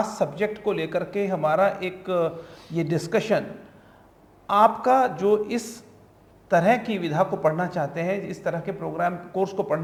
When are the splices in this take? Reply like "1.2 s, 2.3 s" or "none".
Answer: none